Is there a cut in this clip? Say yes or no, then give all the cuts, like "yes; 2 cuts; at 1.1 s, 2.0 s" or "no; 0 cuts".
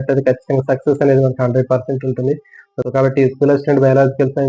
yes; 1 cut; at 2.6 s